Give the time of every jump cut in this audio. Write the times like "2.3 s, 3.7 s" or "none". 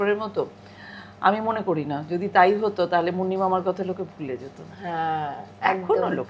none

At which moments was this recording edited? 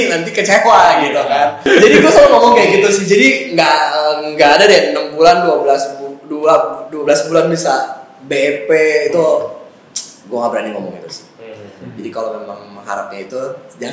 1.7 s

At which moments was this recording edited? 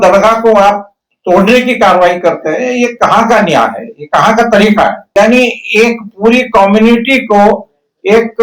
5.0 s

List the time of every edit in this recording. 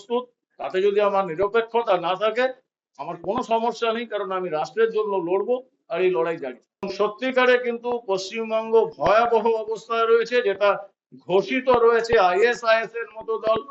6.9 s

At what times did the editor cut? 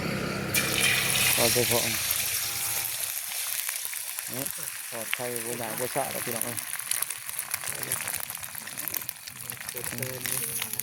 none

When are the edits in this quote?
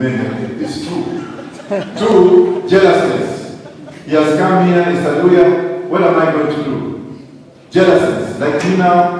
none

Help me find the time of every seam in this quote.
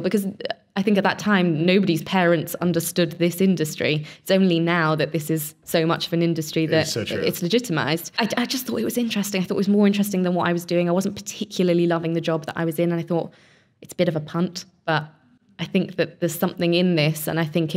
8.1 s

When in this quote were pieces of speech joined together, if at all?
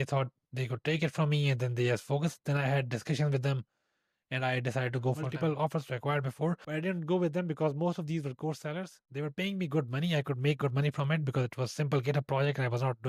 5.3 s

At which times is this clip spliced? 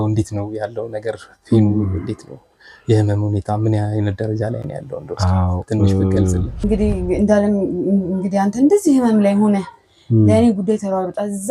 6.5 s

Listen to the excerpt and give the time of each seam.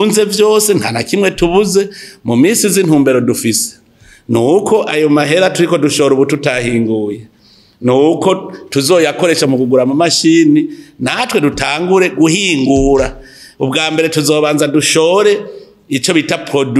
none

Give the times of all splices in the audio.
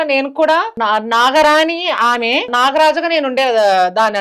2.5 s

